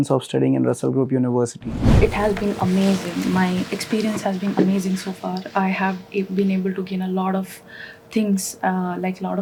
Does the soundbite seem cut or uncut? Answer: uncut